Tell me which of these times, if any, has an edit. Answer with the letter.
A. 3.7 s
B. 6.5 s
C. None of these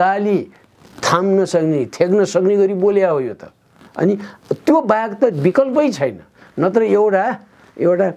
C